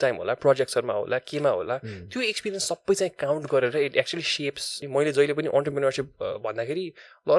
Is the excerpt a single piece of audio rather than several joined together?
no; 1 cut; at 4.8 s

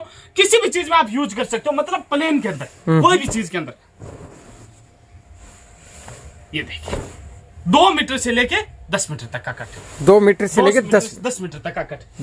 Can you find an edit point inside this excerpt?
no; 0 cuts

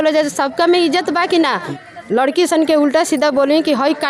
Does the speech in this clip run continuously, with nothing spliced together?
no; 1 cut; at 1.8 s

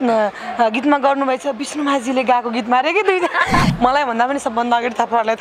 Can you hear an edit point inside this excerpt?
yes; 1 cut; at 3.7 s

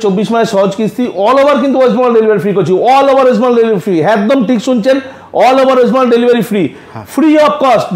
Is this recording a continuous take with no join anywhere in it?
yes; 0 cuts

